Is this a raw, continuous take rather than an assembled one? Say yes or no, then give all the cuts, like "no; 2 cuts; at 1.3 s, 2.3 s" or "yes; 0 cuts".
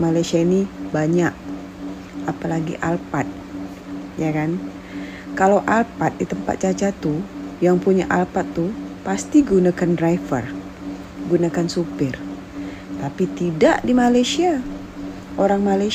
yes; 0 cuts